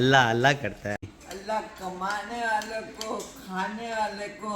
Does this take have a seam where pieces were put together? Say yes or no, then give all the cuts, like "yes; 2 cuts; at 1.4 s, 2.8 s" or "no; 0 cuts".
yes; 1 cut; at 1.0 s